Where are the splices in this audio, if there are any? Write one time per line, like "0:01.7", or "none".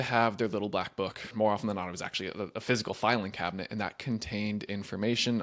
0:01.3